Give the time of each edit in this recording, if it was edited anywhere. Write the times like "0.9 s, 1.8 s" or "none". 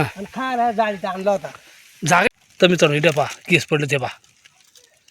2.3 s